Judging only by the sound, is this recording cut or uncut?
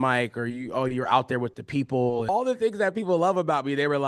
cut